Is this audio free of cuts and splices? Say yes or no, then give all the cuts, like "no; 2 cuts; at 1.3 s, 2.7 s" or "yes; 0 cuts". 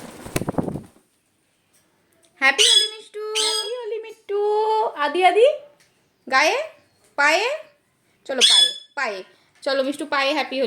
no; 1 cut; at 3.5 s